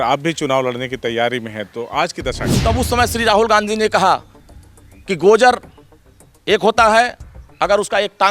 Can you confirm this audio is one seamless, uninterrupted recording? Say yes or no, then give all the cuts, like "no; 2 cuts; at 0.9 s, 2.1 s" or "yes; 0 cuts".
no; 1 cut; at 2.5 s